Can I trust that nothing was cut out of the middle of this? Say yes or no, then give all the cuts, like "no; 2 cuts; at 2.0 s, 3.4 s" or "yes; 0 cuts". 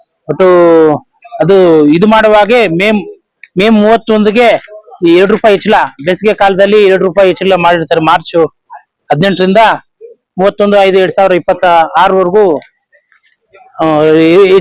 yes; 0 cuts